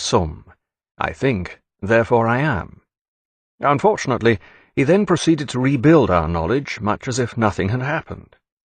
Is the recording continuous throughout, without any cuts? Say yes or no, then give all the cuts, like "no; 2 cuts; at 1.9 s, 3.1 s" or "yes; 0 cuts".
no; 1 cut; at 3.5 s